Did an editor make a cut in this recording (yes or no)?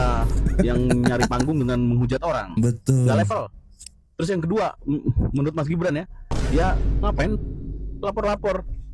no